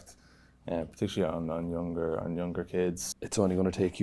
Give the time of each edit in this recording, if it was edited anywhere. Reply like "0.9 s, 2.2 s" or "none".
3.1 s